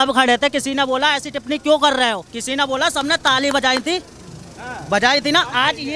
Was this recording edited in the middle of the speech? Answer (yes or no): yes